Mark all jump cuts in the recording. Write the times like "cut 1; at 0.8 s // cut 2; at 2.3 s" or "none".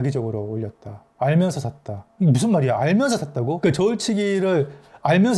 none